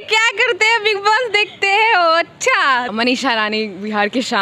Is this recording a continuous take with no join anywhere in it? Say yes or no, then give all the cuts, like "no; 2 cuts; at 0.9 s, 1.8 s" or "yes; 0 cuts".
no; 1 cut; at 2.9 s